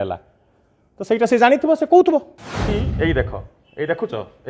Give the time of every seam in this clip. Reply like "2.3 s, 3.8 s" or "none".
2.8 s